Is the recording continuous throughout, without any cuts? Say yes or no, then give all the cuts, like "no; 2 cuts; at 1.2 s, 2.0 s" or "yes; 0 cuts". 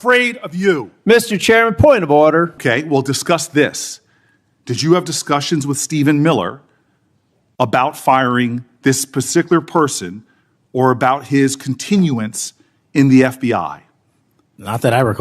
no; 1 cut; at 2.6 s